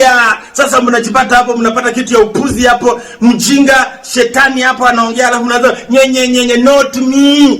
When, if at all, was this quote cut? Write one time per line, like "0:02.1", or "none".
none